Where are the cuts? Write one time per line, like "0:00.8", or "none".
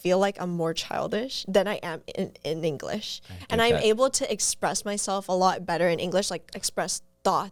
none